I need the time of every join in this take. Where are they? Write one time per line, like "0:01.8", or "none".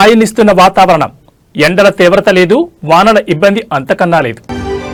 none